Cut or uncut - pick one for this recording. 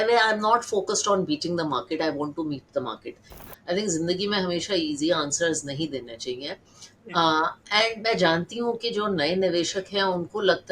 cut